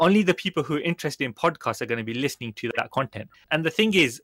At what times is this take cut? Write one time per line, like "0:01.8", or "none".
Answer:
0:03.2